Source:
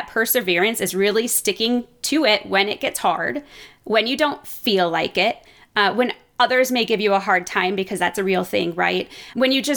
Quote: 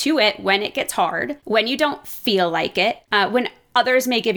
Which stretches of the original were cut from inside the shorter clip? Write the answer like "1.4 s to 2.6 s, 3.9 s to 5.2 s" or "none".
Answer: 3.4 s to 3.8 s, 5.4 s to 5.7 s